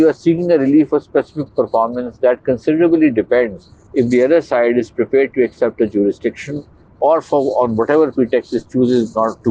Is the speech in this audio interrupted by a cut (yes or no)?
no